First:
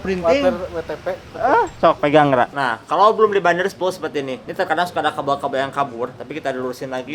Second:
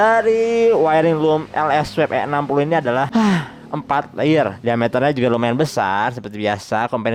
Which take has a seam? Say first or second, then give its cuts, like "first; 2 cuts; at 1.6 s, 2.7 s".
first; 3 cuts; at 2.5 s, 4.4 s, 6.2 s